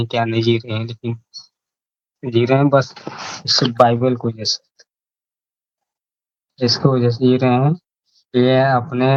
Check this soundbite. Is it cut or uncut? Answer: uncut